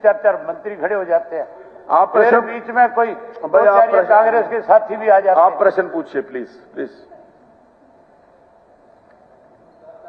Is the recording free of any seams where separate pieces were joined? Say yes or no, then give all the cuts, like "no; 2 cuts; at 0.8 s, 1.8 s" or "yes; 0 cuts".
yes; 0 cuts